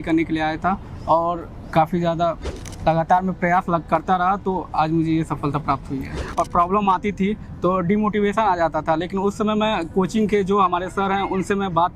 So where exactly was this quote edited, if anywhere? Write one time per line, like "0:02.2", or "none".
0:06.3